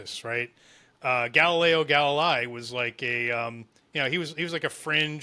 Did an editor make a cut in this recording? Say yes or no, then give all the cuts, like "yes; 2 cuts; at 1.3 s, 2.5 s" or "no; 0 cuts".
no; 0 cuts